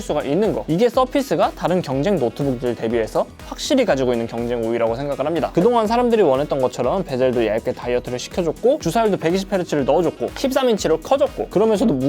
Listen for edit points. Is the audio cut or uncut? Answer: cut